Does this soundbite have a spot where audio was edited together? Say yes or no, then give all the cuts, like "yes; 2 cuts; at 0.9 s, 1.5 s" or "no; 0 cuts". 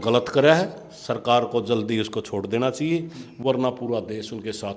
no; 0 cuts